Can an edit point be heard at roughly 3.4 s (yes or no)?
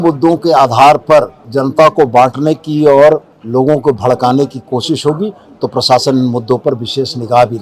yes